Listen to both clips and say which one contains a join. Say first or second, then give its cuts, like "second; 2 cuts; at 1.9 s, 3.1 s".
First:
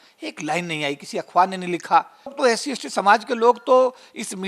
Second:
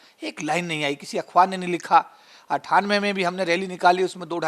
first; 1 cut; at 2.3 s